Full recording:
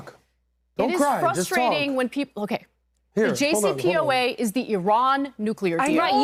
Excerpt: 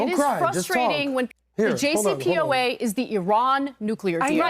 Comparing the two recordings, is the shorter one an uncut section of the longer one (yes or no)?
no